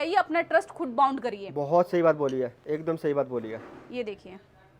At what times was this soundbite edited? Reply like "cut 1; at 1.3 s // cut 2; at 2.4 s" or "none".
none